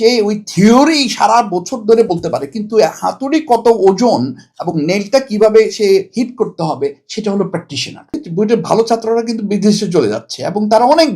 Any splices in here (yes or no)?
yes